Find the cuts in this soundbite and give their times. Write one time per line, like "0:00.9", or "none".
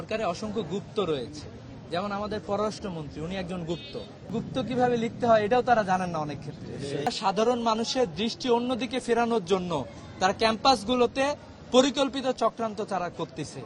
0:04.3
0:07.1